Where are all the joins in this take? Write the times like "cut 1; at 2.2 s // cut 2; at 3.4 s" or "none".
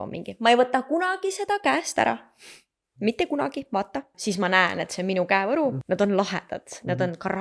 cut 1; at 4.2 s // cut 2; at 5.8 s